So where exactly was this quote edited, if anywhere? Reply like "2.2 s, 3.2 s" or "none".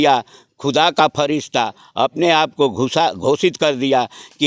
none